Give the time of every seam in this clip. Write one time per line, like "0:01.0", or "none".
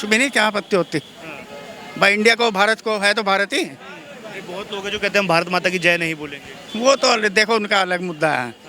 none